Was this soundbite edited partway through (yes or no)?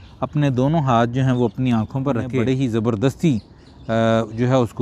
yes